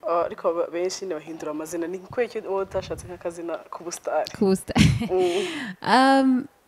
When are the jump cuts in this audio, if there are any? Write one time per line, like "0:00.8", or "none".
none